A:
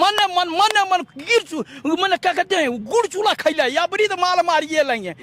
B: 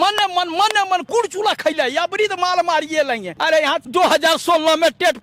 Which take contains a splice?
B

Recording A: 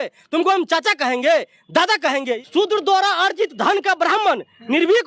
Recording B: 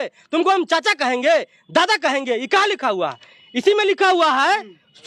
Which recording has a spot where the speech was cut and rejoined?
A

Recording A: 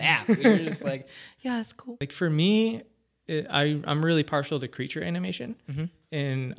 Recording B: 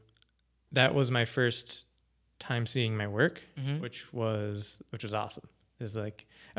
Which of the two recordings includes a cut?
A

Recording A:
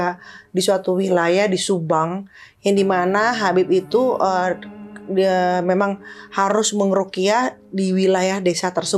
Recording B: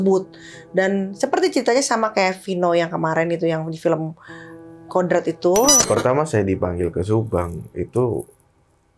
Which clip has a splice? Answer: B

